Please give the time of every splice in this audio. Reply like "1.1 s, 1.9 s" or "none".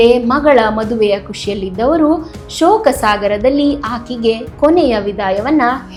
none